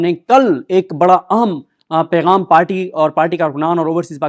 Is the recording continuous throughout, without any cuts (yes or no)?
yes